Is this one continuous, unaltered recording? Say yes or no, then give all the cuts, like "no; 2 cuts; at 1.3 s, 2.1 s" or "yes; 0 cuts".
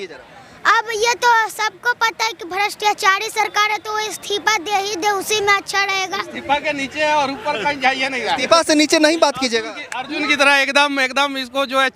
yes; 0 cuts